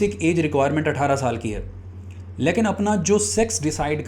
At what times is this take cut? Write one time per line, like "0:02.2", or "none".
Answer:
none